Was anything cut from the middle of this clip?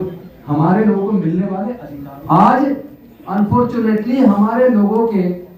yes; 1 cut; at 1.8 s

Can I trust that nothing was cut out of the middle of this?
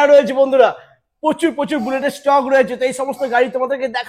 yes; 0 cuts

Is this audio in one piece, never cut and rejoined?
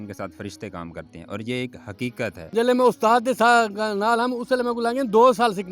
no; 1 cut; at 2.5 s

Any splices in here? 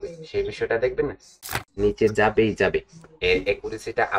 yes; 1 cut; at 1.4 s

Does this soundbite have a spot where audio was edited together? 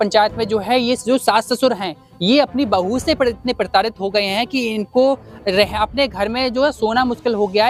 no; 0 cuts

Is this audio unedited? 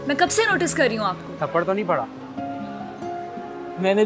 no; 1 cut; at 1.3 s

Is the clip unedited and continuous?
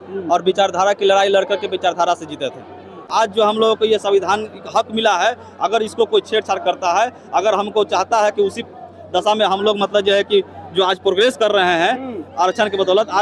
no; 1 cut; at 3.0 s

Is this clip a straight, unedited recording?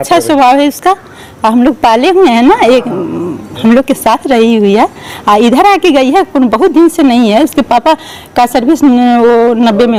yes; 0 cuts

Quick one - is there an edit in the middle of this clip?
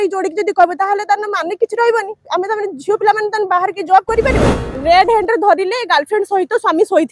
yes; 1 cut; at 4.7 s

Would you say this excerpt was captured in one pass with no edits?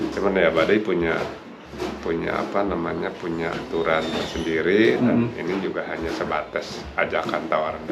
yes; 0 cuts

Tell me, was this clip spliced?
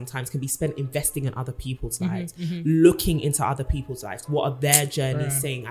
no; 0 cuts

